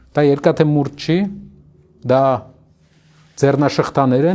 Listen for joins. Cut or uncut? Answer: uncut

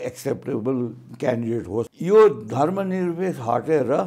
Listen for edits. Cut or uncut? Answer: cut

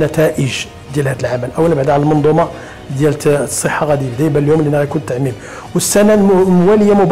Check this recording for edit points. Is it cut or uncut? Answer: uncut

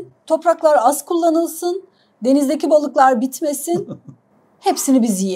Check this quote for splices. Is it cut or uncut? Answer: uncut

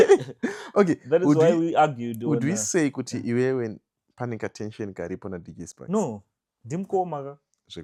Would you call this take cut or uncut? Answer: uncut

